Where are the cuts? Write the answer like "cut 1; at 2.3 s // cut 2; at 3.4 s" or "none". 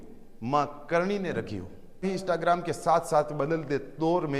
cut 1; at 2.0 s